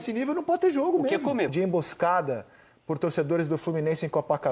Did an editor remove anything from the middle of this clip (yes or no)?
yes